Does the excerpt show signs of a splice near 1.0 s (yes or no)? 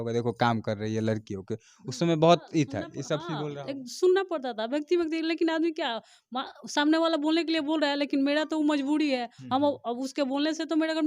no